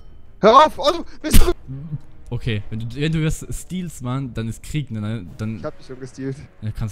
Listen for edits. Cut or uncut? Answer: cut